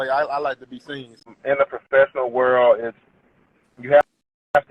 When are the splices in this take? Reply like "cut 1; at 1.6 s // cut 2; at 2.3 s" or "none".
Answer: cut 1; at 1.3 s